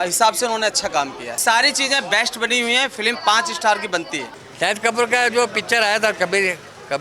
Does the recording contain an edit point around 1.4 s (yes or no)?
yes